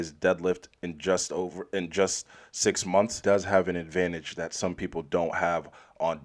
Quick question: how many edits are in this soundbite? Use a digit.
1